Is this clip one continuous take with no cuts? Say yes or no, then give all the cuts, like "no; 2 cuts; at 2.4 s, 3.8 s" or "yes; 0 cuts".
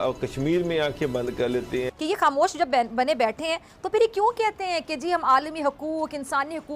no; 1 cut; at 1.9 s